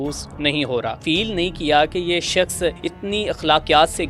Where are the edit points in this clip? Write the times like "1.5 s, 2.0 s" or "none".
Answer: 1.0 s, 2.8 s